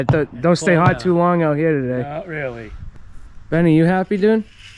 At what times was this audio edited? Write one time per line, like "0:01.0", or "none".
0:02.9